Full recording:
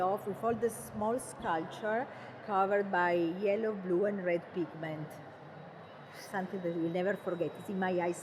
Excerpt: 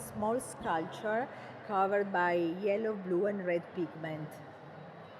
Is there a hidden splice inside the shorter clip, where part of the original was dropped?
no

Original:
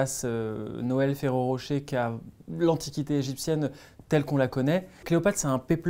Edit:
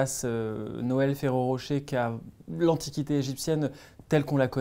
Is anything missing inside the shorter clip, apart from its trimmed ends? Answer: no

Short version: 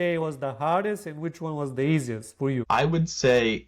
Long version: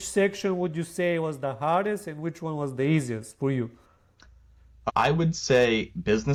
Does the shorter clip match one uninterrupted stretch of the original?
no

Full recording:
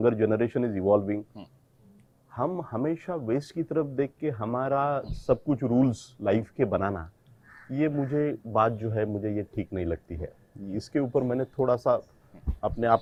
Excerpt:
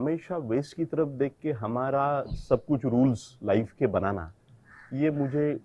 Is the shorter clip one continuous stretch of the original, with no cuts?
yes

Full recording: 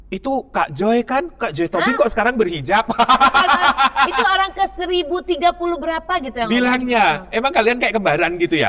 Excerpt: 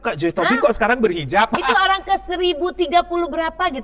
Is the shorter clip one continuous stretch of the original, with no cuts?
no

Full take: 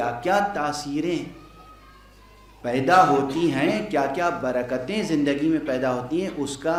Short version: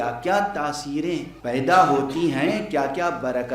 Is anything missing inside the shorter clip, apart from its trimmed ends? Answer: yes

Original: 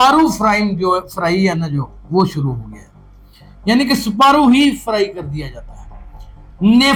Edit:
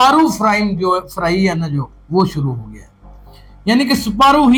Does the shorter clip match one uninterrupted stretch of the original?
yes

